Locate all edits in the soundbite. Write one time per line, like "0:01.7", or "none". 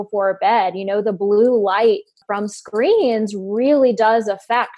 0:02.2